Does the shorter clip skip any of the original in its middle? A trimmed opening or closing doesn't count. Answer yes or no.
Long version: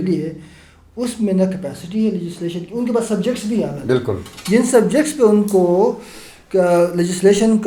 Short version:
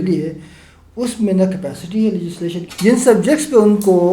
yes